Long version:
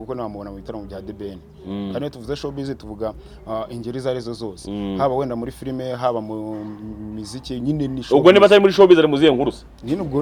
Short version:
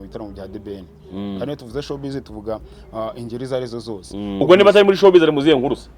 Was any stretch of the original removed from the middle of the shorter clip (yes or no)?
yes